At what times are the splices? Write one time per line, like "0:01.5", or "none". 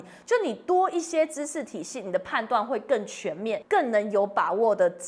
0:03.6